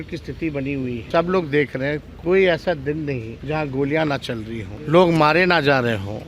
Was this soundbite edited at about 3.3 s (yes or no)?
yes